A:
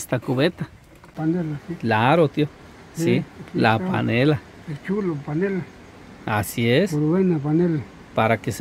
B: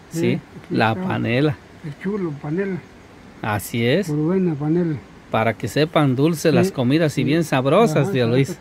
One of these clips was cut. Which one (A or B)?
A